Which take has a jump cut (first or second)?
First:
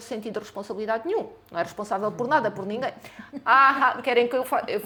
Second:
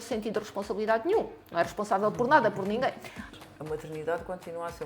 second